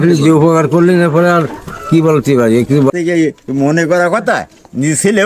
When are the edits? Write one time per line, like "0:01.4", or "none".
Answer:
0:02.9